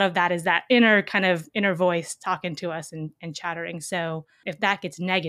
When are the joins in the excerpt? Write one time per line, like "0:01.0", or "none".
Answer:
0:04.4